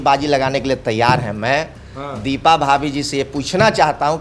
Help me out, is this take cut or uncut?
uncut